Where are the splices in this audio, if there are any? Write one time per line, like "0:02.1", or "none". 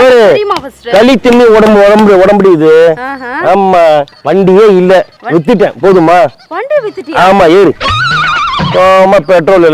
0:04.1